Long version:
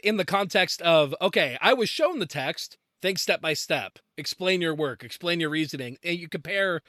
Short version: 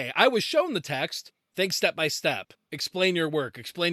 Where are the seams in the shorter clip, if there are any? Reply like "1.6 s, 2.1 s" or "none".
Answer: none